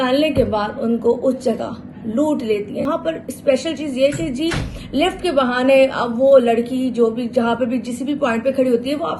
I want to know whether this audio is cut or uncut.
cut